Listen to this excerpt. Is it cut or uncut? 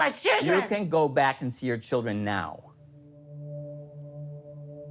cut